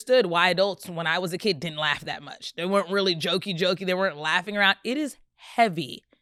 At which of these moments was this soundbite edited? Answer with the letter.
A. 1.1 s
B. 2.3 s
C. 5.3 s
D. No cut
D